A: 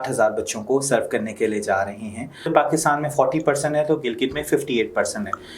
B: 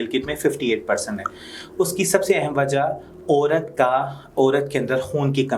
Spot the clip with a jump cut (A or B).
A